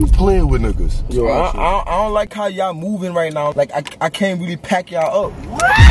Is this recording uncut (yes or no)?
no